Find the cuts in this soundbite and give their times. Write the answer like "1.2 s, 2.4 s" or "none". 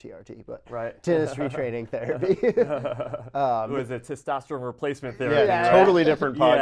none